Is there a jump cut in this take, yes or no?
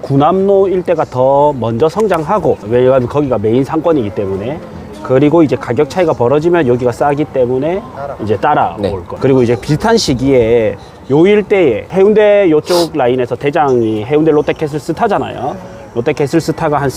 yes